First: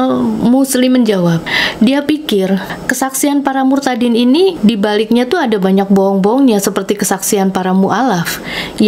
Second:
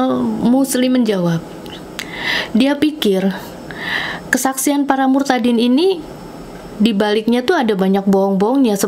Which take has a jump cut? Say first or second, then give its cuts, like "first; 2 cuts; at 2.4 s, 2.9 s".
first; 3 cuts; at 1.6 s, 2.8 s, 4.6 s